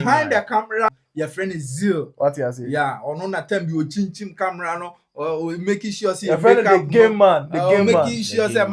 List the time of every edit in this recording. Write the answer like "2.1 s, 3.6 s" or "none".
1.0 s